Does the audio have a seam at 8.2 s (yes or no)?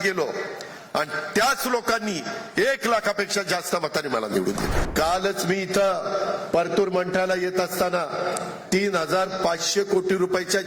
no